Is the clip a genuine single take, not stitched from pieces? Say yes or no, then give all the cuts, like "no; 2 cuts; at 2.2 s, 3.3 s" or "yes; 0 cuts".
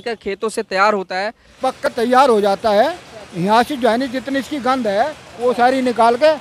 no; 1 cut; at 1.8 s